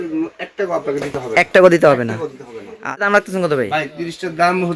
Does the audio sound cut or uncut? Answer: cut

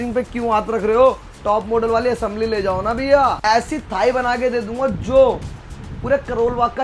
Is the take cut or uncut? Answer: cut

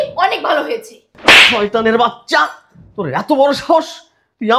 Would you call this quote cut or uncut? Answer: uncut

